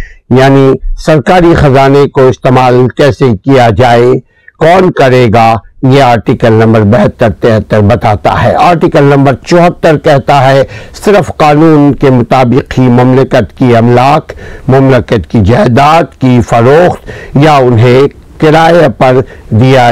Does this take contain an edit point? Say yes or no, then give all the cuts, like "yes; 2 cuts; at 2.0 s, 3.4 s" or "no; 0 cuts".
no; 0 cuts